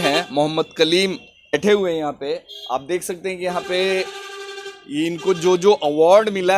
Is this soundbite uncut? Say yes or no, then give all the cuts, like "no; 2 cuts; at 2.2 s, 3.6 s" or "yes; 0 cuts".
no; 1 cut; at 1.6 s